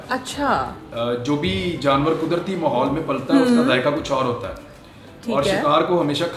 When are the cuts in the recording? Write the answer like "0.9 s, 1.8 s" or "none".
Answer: none